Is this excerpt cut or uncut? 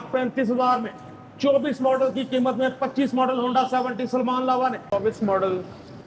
cut